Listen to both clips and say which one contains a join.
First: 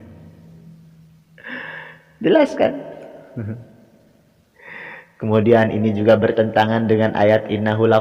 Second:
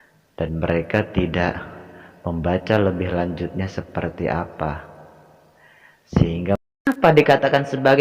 second; 1 cut; at 6.9 s

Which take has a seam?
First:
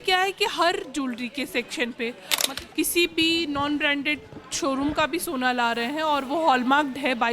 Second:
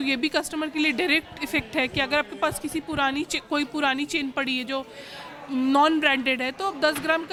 first; 1 cut; at 2.5 s

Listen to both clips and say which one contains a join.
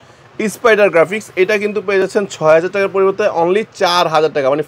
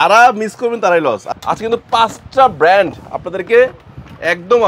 second; 1 cut; at 1.3 s

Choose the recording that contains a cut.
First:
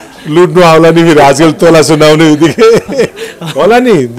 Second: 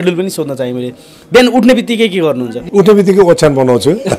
second; 1 cut; at 2.6 s

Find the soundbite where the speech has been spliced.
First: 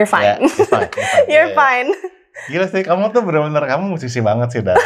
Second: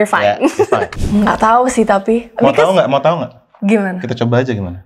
second; 1 cut; at 0.9 s

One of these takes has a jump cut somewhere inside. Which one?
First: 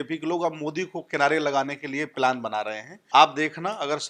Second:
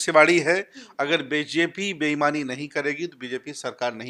first; 1 cut; at 2.9 s

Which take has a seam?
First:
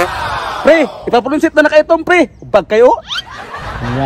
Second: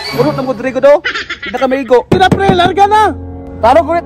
second; 1 cut; at 2.1 s

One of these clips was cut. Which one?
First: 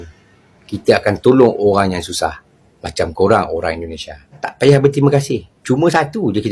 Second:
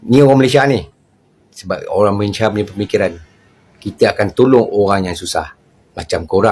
first; 1 cut; at 4.4 s

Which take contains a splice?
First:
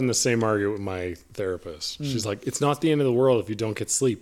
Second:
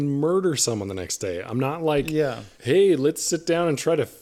second; 1 cut; at 2.5 s

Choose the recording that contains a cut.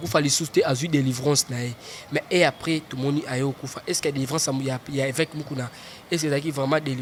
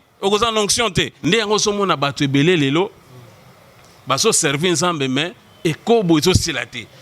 second; 1 cut; at 1.1 s

